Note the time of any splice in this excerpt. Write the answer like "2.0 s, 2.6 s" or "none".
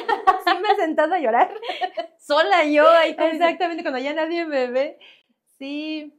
none